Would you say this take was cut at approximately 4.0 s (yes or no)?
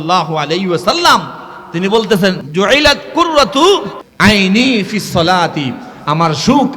yes